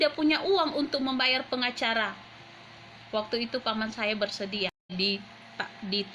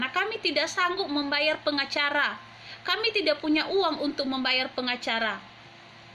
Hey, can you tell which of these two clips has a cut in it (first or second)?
first